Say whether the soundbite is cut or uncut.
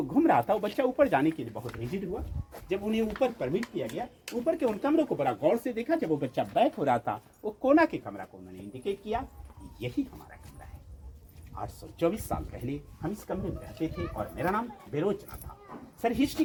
uncut